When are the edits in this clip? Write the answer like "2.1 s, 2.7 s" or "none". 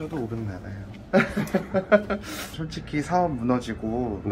2.5 s